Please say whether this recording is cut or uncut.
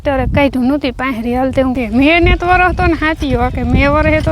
cut